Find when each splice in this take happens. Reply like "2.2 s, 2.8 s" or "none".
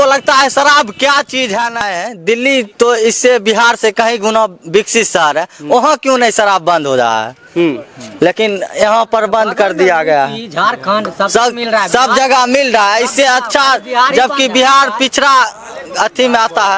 1.8 s